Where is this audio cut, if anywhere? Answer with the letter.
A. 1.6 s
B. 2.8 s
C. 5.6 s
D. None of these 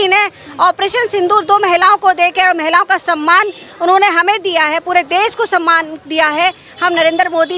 D